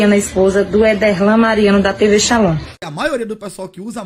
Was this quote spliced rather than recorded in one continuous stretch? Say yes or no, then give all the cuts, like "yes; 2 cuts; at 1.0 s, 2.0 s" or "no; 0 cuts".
yes; 1 cut; at 2.8 s